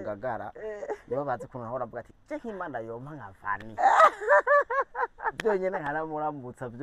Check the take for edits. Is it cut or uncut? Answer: uncut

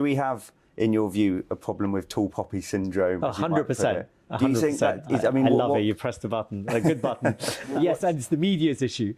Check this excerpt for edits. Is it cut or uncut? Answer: uncut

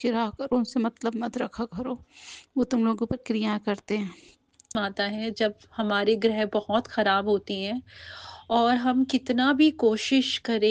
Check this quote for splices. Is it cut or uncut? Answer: cut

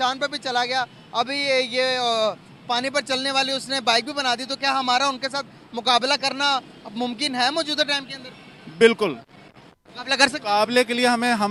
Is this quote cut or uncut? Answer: uncut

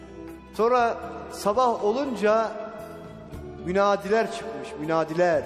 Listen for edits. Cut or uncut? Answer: uncut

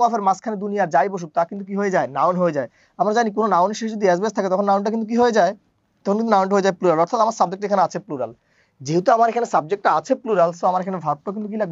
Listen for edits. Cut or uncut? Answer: uncut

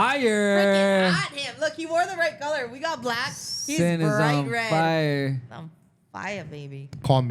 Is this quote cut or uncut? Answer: uncut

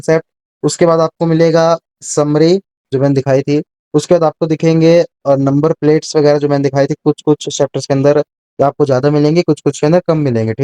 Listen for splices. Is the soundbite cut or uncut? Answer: uncut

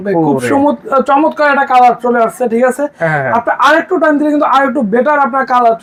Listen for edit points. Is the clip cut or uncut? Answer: uncut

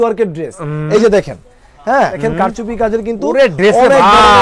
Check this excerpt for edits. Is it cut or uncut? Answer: cut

